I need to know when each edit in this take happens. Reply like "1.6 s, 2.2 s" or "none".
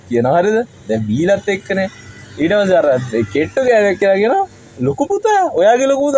none